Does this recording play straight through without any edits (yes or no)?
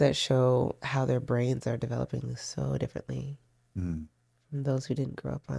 yes